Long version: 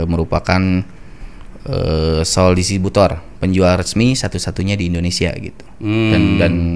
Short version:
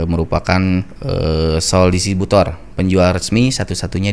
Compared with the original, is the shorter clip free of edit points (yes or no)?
no